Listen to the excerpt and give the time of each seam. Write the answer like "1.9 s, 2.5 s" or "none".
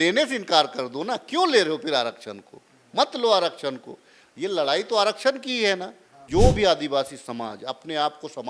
6.2 s